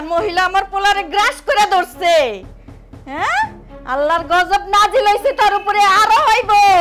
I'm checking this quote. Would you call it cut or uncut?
uncut